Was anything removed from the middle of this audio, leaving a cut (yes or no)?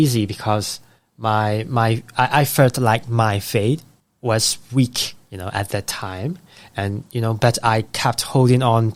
no